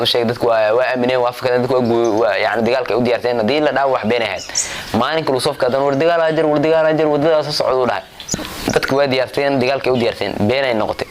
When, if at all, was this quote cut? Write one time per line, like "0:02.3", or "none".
0:08.5